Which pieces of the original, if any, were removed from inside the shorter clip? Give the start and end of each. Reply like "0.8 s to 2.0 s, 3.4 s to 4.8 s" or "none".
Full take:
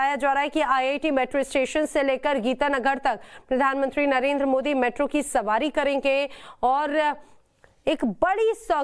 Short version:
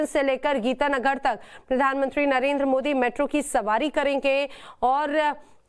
none